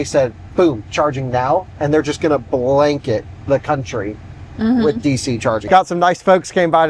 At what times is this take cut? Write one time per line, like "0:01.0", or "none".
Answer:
0:05.6